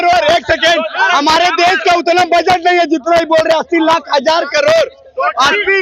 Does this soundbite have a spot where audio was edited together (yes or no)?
no